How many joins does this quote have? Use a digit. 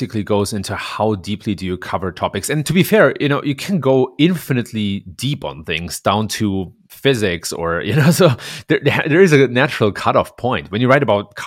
1